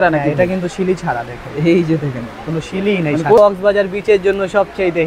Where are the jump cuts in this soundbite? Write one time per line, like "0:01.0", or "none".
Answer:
0:03.4